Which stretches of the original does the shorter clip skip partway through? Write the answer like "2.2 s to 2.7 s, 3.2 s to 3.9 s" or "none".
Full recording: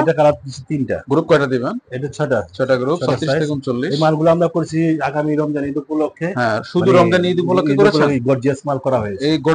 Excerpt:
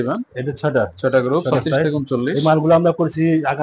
none